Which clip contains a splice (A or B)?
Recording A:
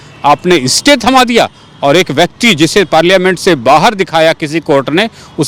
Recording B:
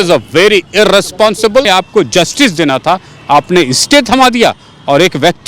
B